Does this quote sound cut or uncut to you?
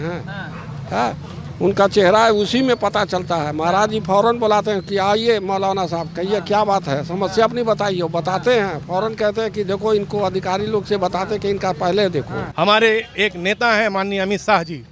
cut